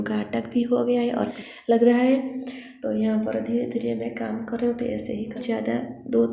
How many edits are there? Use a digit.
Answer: 2